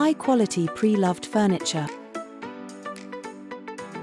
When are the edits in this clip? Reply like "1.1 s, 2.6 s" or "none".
1.9 s